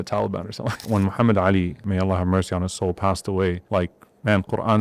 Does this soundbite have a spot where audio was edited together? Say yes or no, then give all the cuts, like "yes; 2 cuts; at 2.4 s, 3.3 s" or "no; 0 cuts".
yes; 3 cuts; at 0.8 s, 1.8 s, 3.6 s